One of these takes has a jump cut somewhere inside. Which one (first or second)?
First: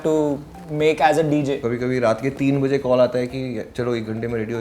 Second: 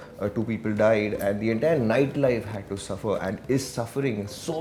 first